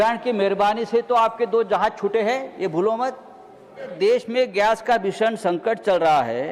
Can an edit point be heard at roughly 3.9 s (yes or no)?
yes